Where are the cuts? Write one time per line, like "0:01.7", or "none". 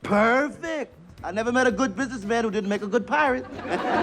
none